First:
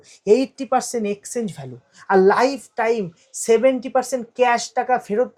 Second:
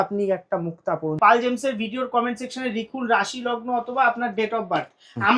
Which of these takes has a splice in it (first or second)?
second